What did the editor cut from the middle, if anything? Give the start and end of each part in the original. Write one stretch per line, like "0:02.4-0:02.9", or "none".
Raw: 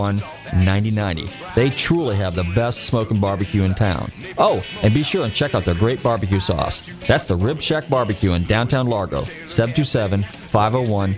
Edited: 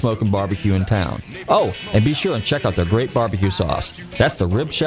none